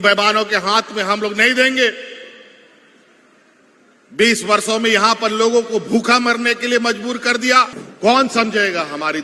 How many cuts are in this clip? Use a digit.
1